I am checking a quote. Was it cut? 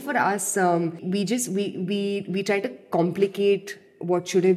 yes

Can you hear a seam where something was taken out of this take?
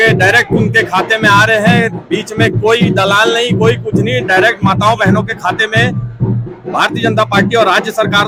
no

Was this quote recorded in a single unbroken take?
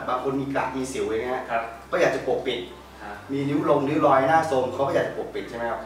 yes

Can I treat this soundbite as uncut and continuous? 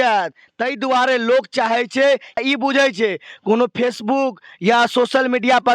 no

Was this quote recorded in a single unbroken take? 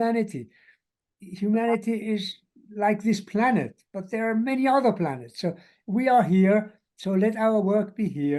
yes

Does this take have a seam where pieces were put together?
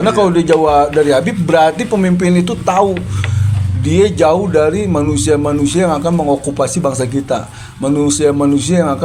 no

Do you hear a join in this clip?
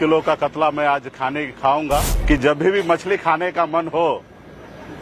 yes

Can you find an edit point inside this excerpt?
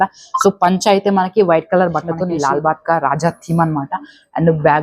yes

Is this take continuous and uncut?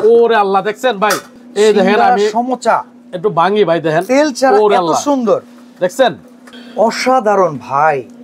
yes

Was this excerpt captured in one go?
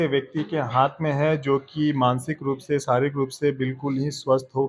yes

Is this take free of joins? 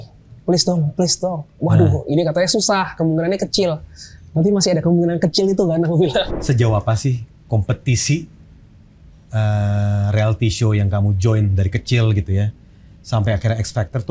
no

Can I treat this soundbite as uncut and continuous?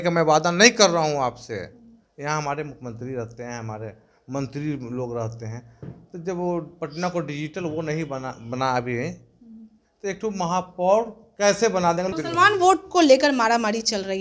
no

